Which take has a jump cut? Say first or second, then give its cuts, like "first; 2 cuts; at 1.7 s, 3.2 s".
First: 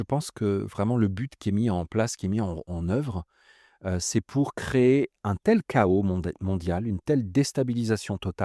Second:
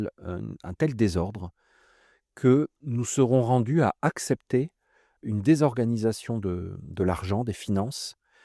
second; 2 cuts; at 2.8 s, 5.2 s